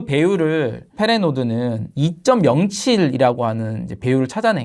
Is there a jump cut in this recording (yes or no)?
yes